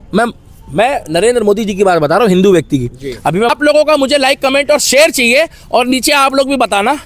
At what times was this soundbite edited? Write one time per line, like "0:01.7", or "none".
0:03.5